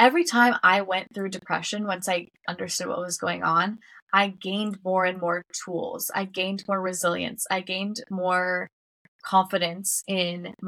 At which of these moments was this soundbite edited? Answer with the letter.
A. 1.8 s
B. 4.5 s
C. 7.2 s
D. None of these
D